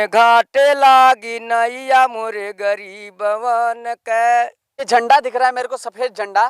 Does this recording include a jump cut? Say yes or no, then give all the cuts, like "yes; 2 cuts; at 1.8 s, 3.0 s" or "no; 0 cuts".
yes; 1 cut; at 4.8 s